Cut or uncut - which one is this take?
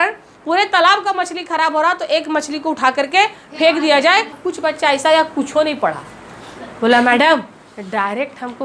cut